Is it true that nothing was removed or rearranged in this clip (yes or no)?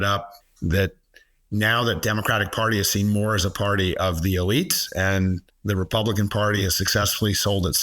no